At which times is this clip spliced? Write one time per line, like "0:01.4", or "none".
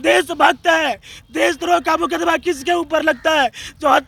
none